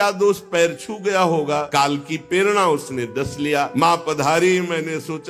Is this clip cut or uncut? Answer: cut